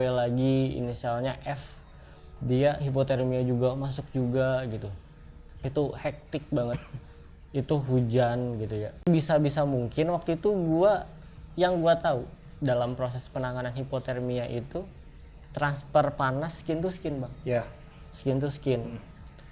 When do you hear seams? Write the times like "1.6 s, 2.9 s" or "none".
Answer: 9.1 s